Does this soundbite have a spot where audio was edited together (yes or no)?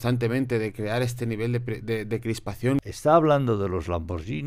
yes